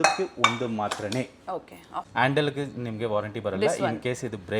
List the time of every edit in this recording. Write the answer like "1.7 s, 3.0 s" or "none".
2.0 s